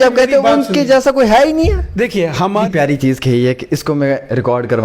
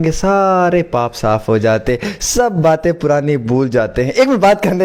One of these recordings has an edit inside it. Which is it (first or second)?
first